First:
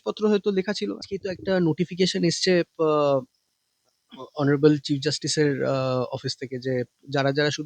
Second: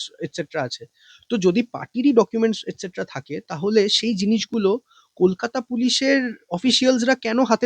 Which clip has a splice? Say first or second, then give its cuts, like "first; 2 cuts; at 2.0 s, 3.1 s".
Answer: first; 1 cut; at 1.0 s